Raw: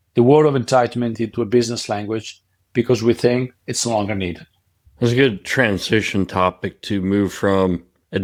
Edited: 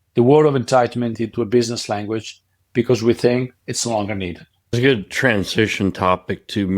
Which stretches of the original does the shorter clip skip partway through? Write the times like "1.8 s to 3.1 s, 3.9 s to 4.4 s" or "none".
4.7 s to 5.1 s